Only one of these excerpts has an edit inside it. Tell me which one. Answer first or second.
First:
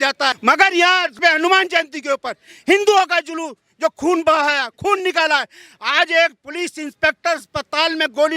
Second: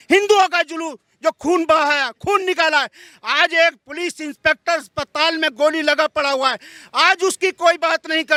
first